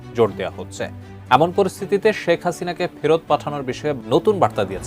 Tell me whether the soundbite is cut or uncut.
cut